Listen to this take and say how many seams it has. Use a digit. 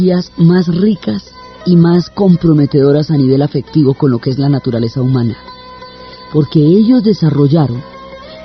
1